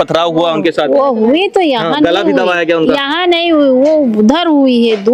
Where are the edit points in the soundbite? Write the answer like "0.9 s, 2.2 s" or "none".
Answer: none